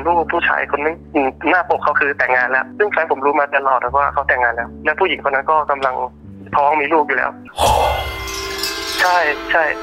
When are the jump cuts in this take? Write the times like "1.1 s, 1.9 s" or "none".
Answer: 1.0 s, 2.6 s